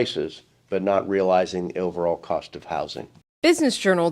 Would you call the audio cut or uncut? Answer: cut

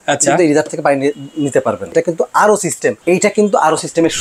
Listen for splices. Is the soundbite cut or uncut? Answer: cut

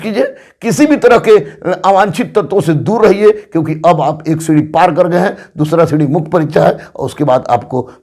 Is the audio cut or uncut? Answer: uncut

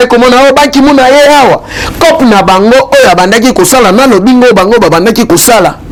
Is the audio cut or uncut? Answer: uncut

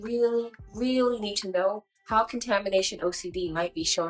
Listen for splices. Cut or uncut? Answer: uncut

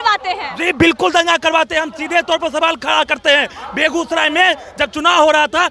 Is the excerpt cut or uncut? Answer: uncut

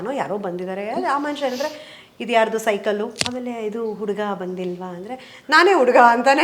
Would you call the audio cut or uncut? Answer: cut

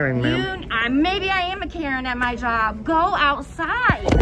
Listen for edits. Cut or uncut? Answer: uncut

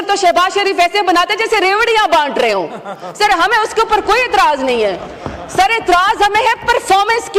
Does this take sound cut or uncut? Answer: uncut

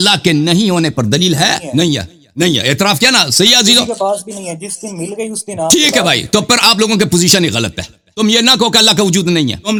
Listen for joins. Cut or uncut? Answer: uncut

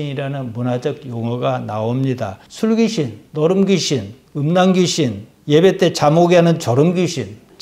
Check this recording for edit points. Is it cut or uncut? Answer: uncut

